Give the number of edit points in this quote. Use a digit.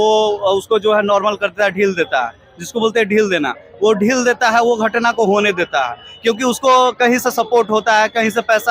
0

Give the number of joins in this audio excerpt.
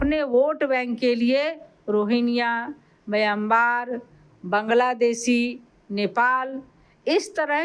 0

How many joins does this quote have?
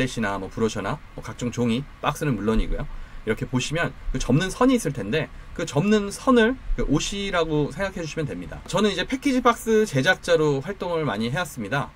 1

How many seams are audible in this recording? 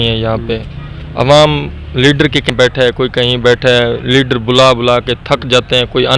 1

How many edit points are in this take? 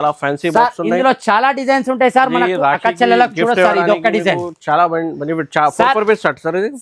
0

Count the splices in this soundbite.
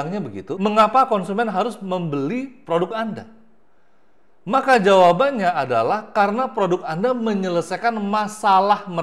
0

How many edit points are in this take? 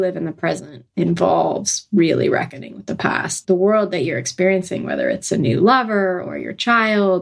1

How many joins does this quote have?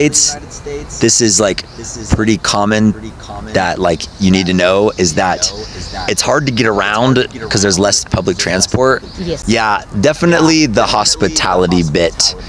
1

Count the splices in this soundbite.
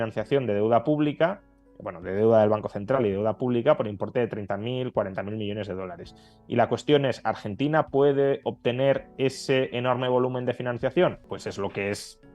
1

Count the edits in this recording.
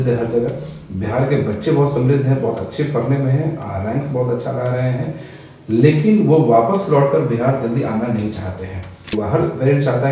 1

